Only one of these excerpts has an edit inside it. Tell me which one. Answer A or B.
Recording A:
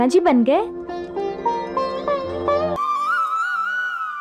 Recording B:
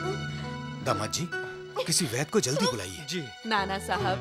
A